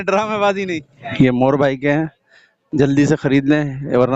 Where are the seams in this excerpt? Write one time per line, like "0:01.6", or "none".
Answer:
0:01.1